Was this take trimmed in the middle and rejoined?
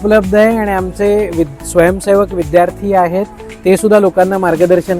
no; 0 cuts

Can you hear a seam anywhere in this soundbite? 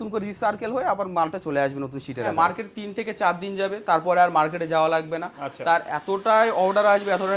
yes; 1 cut; at 2.3 s

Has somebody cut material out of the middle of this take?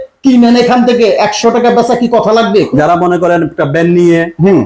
yes; 1 cut; at 2.7 s

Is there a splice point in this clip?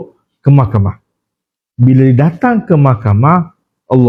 no; 0 cuts

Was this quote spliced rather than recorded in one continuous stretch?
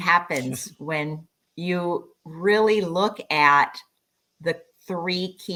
no; 0 cuts

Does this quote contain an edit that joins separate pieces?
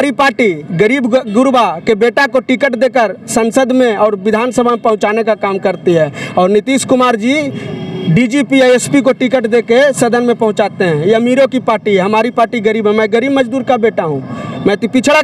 no; 0 cuts

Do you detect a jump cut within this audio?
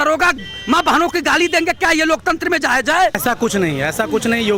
yes; 1 cut; at 3.2 s

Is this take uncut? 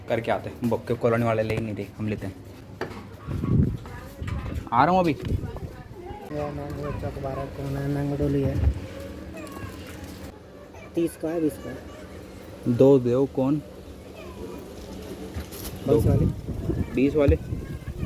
yes; 0 cuts

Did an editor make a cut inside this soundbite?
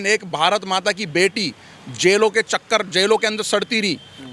no; 0 cuts

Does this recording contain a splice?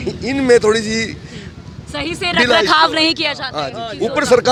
no; 0 cuts

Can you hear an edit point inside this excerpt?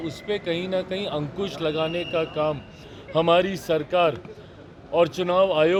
no; 0 cuts

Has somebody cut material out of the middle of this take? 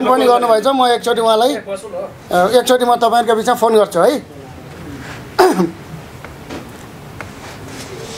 no; 0 cuts

